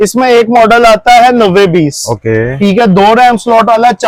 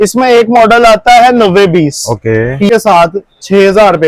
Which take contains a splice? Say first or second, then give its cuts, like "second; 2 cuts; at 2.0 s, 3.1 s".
second; 1 cut; at 2.7 s